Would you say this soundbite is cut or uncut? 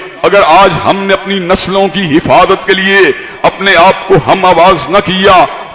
uncut